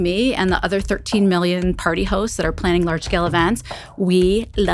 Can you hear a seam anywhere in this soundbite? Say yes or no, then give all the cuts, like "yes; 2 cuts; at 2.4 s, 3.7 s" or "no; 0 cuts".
no; 0 cuts